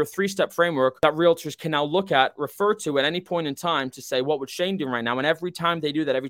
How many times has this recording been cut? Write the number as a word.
one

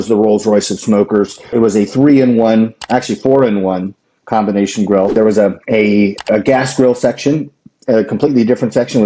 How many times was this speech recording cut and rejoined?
two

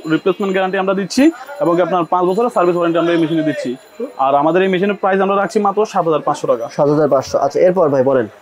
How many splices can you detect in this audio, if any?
zero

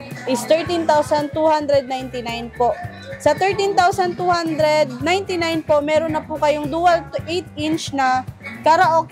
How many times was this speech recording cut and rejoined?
zero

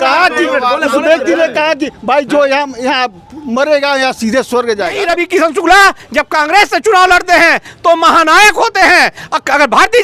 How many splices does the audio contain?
one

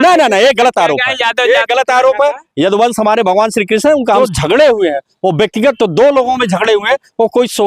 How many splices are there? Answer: one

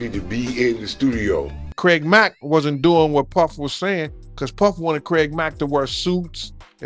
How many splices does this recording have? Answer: one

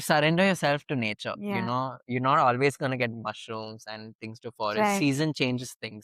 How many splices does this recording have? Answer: zero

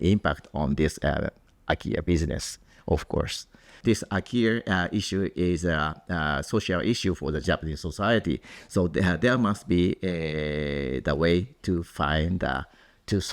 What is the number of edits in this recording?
two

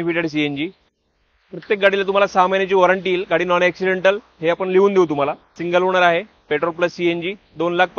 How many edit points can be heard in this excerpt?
one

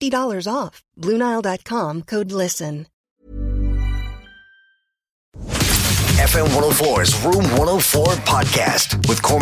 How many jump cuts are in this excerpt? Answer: two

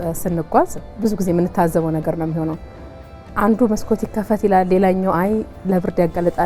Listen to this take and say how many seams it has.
zero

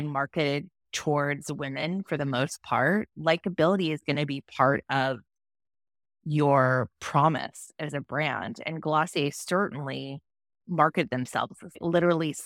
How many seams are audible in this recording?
zero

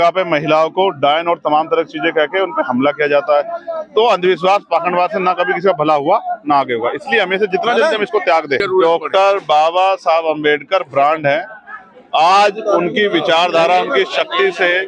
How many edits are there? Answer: one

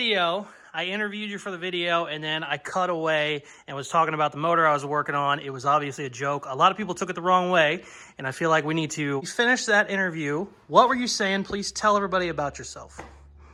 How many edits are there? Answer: zero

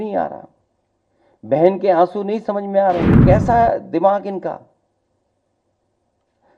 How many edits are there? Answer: one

